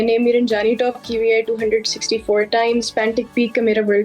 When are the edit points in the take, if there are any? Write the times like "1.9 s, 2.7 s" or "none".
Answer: 2.8 s